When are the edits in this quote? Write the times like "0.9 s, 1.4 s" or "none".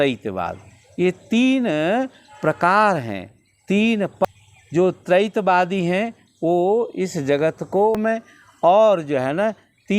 4.2 s, 8.0 s